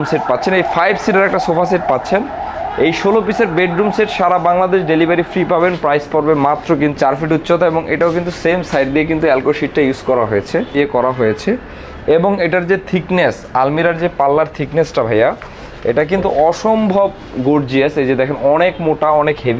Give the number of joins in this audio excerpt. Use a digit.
2